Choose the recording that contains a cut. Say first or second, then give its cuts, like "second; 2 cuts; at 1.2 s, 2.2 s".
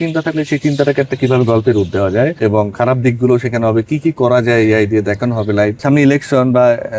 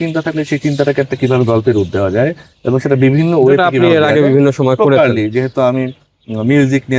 first; 2 cuts; at 2.4 s, 5.8 s